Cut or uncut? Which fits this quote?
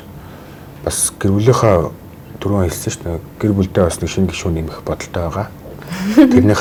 uncut